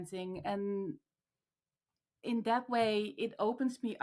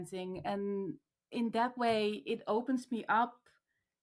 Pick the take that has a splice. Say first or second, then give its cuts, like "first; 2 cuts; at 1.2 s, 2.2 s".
second; 1 cut; at 1.1 s